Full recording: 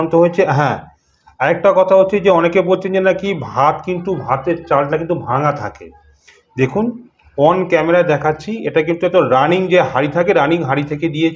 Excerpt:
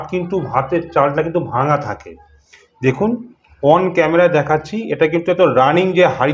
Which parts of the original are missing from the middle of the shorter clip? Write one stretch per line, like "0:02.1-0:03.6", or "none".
none